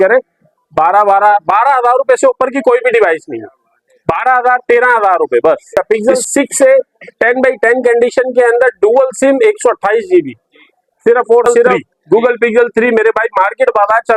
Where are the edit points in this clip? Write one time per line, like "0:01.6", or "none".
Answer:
0:05.8
0:11.9

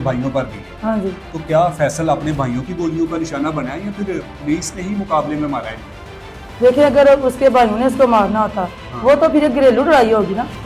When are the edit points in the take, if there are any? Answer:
none

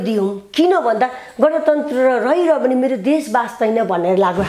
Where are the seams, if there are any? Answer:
none

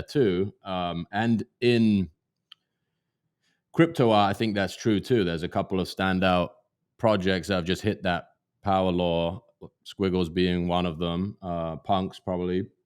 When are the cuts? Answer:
none

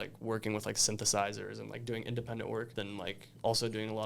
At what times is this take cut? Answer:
0:02.7

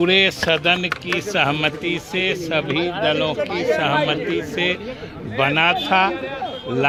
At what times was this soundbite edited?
none

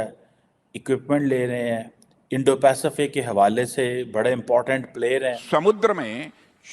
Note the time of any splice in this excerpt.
0:05.4

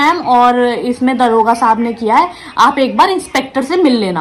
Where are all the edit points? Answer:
none

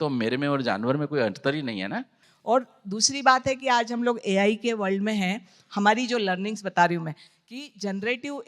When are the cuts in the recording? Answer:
0:02.2

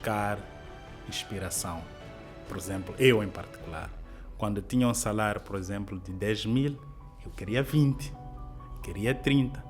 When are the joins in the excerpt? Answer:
0:02.3

